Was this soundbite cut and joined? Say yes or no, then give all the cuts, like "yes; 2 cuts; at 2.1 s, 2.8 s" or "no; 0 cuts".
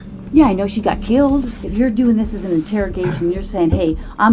yes; 1 cut; at 1.6 s